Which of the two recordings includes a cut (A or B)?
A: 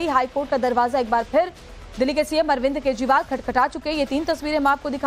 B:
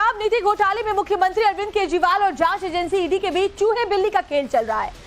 B